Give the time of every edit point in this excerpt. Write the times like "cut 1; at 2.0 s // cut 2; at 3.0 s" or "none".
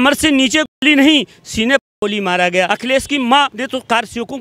cut 1; at 2.7 s // cut 2; at 3.6 s